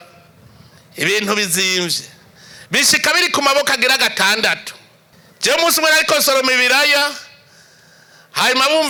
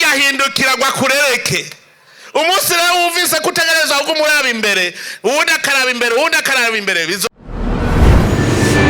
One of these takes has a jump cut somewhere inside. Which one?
second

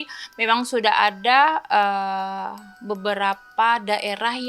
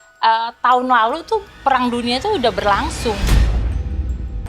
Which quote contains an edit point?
second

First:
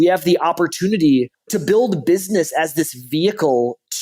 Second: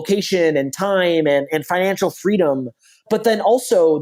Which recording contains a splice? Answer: first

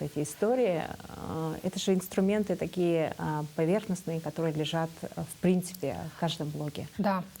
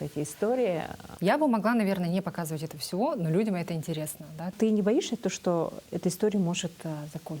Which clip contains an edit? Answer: second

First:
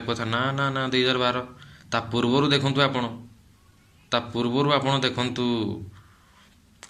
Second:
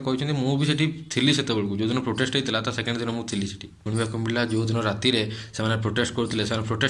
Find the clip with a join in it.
second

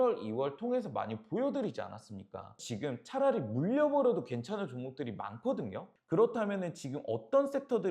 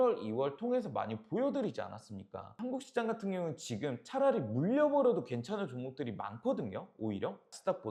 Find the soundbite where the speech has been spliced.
first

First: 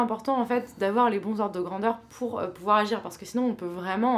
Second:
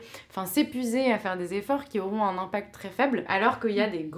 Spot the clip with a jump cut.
second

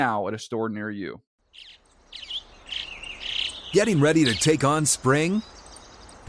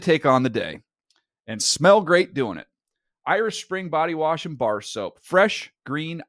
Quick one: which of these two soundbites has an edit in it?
first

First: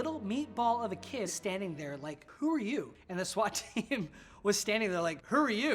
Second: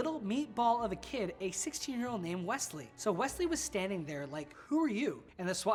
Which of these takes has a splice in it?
first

